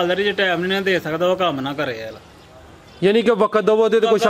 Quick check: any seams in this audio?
no; 0 cuts

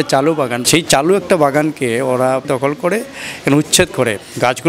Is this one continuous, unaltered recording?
no; 1 cut; at 2.5 s

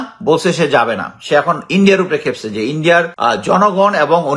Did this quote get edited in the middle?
yes; 1 cut; at 3.1 s

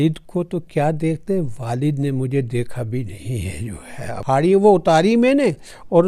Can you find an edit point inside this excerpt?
yes; 1 cut; at 4.1 s

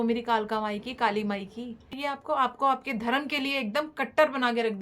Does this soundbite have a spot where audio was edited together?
yes; 1 cut; at 1.9 s

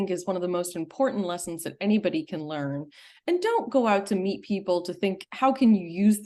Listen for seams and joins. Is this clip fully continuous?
yes; 0 cuts

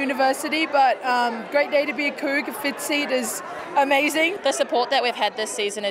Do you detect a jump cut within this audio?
yes; 1 cut; at 4.4 s

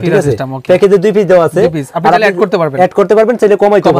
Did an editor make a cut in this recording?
no; 0 cuts

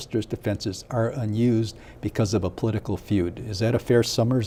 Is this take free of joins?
yes; 0 cuts

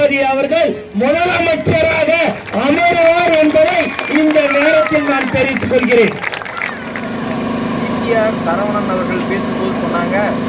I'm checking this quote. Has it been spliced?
no; 0 cuts

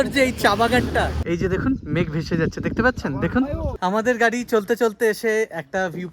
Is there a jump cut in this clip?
yes; 2 cuts; at 1.2 s, 3.7 s

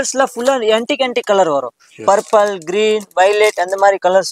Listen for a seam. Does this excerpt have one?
no; 0 cuts

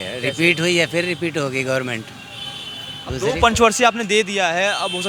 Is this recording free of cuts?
yes; 0 cuts

